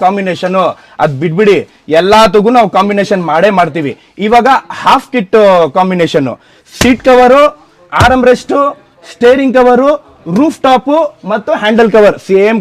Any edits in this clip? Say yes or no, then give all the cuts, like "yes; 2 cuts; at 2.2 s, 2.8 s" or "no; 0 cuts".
no; 0 cuts